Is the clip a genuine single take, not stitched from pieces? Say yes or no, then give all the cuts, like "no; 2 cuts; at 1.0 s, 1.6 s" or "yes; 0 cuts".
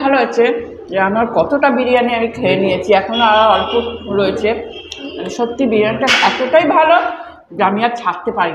yes; 0 cuts